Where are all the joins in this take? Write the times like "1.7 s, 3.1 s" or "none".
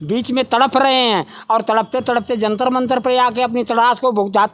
none